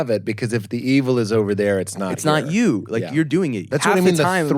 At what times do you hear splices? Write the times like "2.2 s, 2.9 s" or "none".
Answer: 3.6 s